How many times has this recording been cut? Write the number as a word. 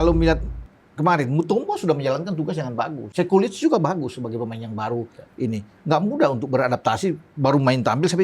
one